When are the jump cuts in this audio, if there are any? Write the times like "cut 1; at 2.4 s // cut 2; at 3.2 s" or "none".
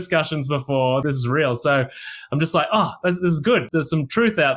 cut 1; at 1.0 s // cut 2; at 3.7 s